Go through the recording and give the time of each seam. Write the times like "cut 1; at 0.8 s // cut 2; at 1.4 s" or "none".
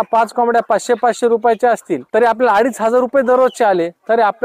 none